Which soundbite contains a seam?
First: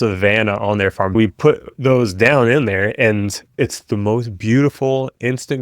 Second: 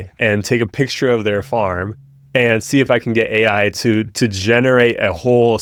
first; 2 cuts; at 1.1 s, 3.5 s

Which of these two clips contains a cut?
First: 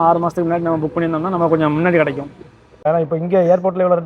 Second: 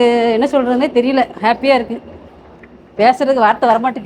first; 1 cut; at 2.8 s

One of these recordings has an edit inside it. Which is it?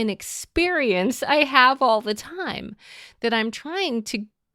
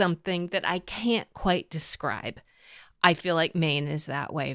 second; 1 cut; at 1.9 s

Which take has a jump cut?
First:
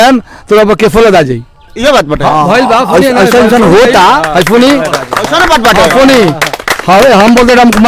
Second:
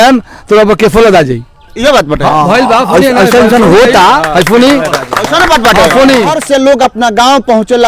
second; 1 cut; at 6.4 s

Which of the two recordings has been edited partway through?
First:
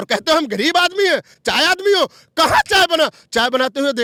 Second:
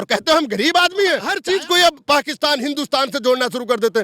second; 1 cut; at 1.3 s

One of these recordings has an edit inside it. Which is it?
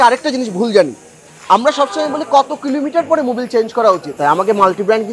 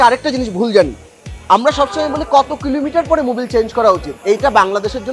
first; 1 cut; at 4.1 s

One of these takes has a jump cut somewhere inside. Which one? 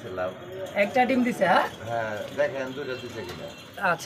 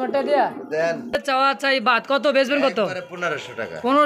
second; 1 cut; at 1.2 s

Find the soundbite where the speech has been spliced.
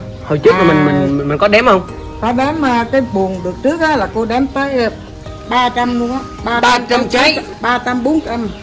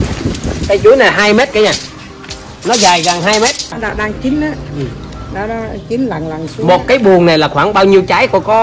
second; 1 cut; at 3.8 s

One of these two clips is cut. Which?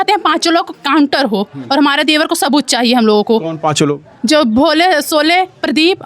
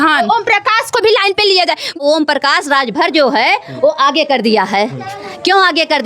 second; 1 cut; at 1.9 s

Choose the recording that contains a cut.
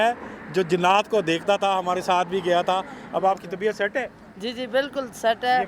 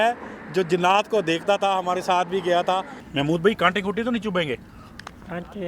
second; 1 cut; at 3.0 s

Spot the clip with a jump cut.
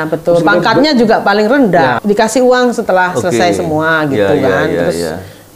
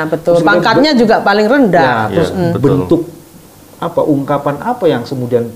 first; 1 cut; at 2.0 s

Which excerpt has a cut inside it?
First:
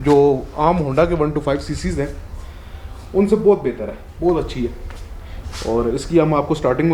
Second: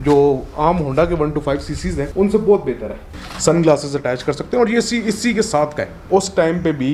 second; 3 cuts; at 2.1 s, 3.1 s, 5.9 s

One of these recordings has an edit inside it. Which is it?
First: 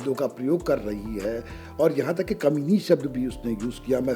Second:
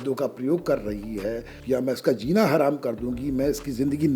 second; 1 cut; at 1.5 s

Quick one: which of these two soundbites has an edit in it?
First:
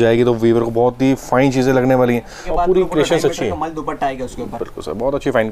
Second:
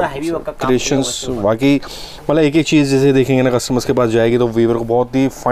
first; 1 cut; at 2.4 s

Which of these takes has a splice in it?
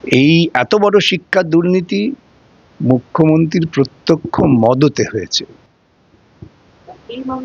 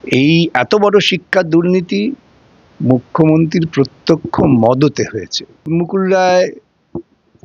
second; 1 cut; at 5.6 s

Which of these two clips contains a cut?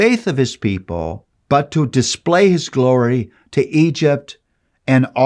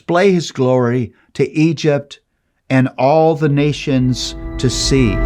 first; 1 cut; at 1.3 s

